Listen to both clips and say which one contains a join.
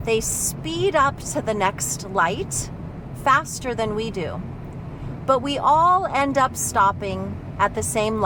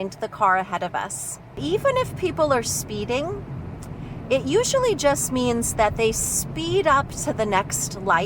second; 1 cut; at 1.6 s

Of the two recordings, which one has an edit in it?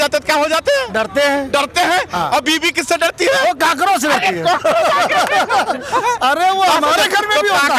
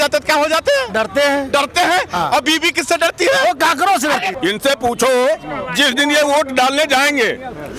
second; 1 cut; at 4.3 s

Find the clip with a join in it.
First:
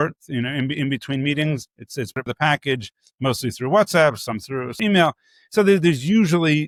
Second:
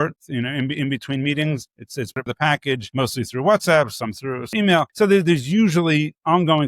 second; 2 cuts; at 2.9 s, 4.9 s

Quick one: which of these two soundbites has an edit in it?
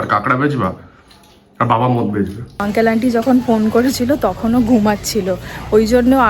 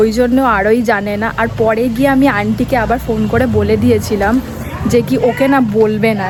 first; 1 cut; at 2.7 s

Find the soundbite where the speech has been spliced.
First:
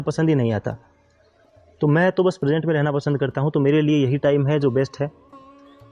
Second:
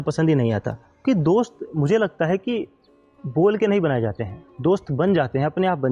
second; 1 cut; at 1.0 s

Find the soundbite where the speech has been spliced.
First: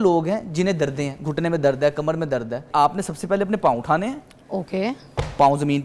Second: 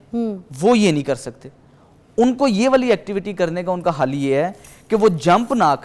first; 1 cut; at 2.6 s

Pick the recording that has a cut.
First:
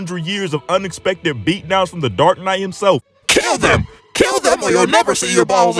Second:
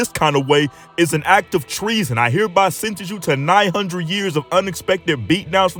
first; 1 cut; at 3.0 s

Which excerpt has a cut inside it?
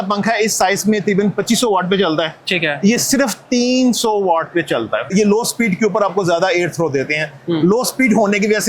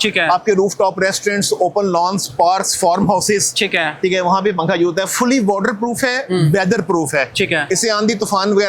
first; 1 cut; at 5.1 s

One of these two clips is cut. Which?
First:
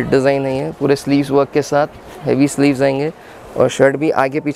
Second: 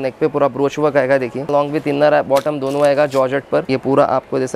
second; 2 cuts; at 1.5 s, 3.7 s

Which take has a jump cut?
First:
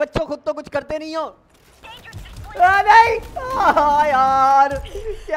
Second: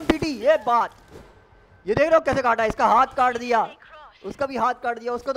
first; 1 cut; at 1.8 s

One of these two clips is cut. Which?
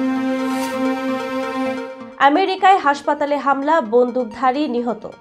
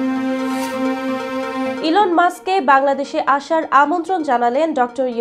first; 1 cut; at 1.8 s

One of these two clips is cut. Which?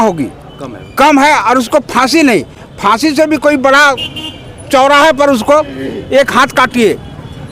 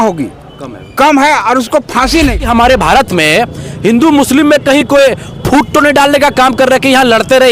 second; 1 cut; at 2.5 s

